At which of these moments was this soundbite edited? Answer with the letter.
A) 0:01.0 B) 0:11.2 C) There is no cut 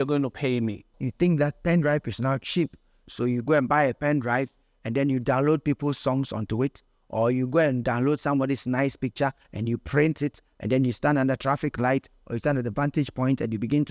A